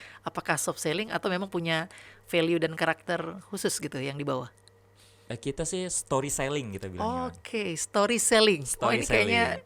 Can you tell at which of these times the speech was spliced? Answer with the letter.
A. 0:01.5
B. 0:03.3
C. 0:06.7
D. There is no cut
D